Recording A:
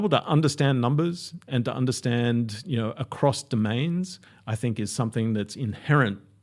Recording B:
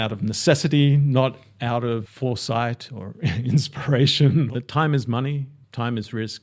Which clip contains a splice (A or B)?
B